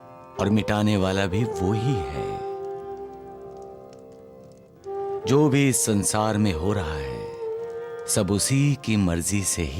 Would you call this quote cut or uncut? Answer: uncut